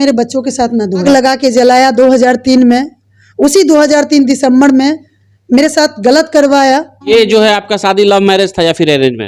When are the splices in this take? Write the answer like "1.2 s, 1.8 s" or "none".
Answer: 1.0 s, 7.0 s